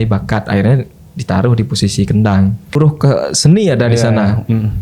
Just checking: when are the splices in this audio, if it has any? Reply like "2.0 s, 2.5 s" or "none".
2.8 s